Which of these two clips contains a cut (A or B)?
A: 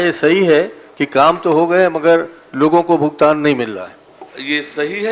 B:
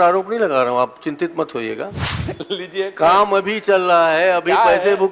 B